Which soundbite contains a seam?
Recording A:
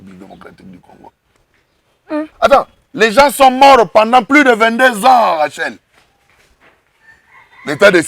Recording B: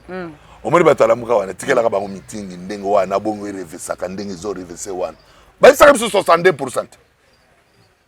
A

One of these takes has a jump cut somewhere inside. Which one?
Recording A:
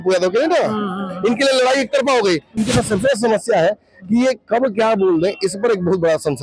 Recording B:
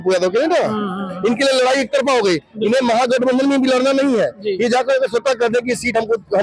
A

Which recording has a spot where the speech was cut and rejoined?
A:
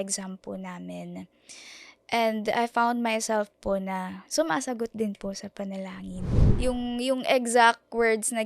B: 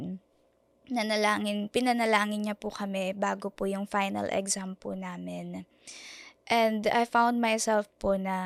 A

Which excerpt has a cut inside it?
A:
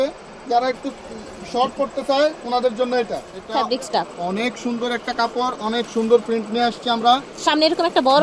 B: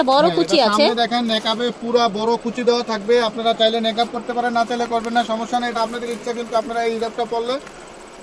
A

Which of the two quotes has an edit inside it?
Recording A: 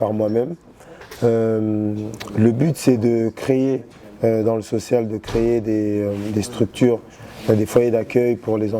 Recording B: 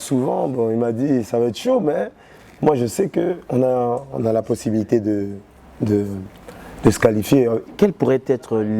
B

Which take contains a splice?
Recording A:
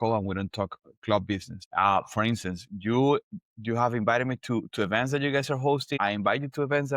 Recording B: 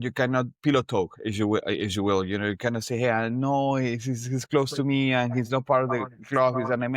A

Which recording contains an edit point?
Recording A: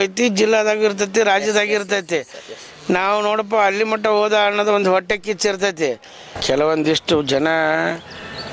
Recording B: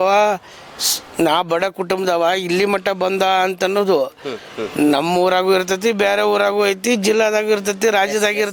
A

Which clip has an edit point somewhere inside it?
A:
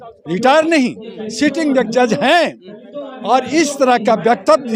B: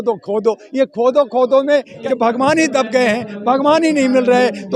B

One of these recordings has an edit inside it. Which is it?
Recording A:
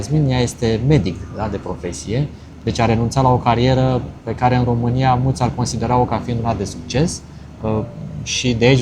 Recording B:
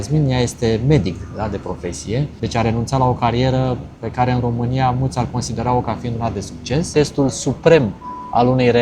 B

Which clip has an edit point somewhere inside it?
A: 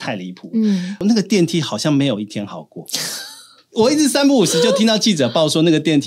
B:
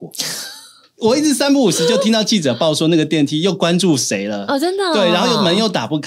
A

